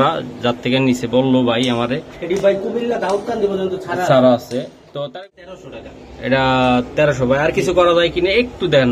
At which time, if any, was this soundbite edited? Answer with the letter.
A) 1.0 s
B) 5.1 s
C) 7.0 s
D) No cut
B